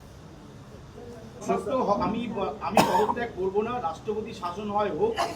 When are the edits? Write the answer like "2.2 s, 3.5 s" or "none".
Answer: 1.4 s